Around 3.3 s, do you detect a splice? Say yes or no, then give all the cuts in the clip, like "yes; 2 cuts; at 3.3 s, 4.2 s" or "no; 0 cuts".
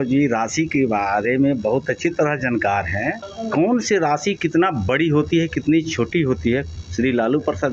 yes; 2 cuts; at 3.3 s, 6.8 s